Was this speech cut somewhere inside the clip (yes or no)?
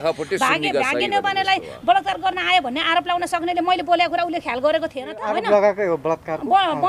yes